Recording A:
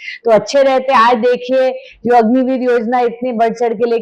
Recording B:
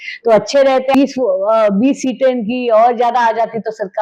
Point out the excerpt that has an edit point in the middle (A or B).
B